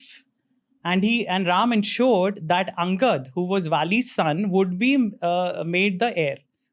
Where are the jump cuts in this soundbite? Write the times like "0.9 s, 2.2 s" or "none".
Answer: none